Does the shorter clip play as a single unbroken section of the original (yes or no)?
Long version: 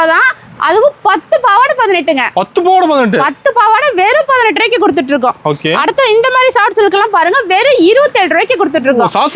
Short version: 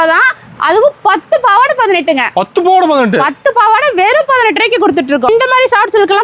no